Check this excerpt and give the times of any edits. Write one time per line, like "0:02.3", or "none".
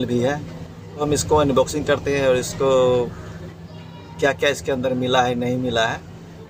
0:01.0